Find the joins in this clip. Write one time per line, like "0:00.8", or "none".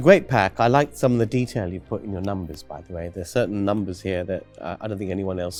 none